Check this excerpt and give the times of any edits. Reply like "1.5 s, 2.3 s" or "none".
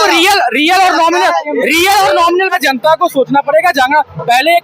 2.6 s